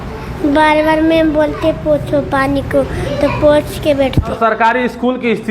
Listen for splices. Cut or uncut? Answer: cut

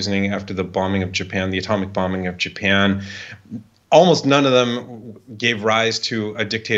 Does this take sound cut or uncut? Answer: uncut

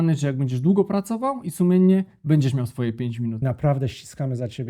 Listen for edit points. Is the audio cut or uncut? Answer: cut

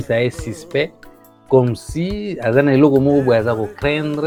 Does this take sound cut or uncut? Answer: uncut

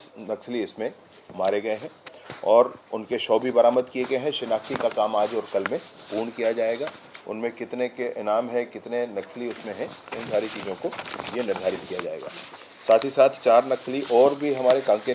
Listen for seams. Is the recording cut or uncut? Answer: uncut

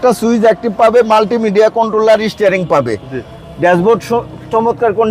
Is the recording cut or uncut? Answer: uncut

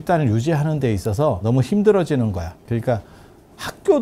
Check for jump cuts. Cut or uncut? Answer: cut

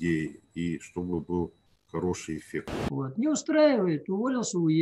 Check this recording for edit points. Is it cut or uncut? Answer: cut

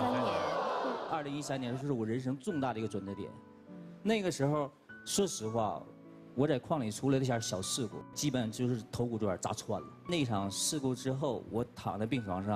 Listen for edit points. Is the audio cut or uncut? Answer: cut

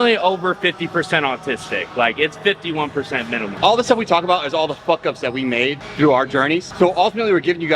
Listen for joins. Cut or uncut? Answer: cut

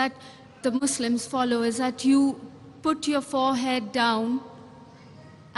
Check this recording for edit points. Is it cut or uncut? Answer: cut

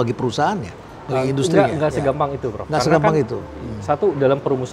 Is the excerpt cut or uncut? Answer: uncut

